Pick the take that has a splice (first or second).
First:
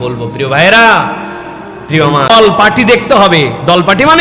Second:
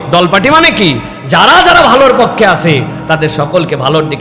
first